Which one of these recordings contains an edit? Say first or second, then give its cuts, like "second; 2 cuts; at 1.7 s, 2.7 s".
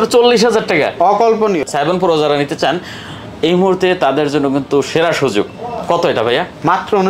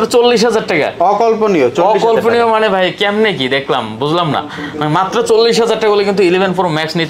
first; 1 cut; at 1.6 s